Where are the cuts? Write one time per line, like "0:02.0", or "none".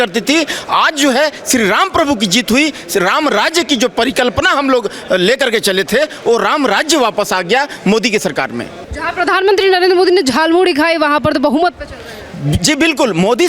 0:08.9